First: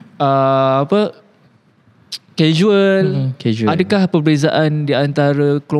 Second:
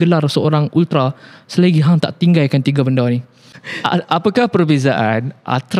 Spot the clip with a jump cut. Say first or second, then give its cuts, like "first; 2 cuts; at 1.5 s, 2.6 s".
second; 1 cut; at 3.6 s